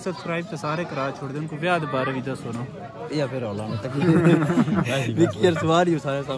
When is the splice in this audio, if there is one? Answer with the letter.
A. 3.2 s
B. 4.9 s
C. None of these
B